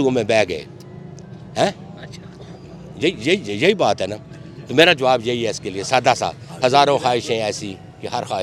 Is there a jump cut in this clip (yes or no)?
no